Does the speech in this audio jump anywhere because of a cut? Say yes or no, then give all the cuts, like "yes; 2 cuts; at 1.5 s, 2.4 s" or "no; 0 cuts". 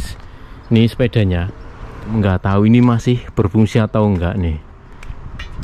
yes; 1 cut; at 2.1 s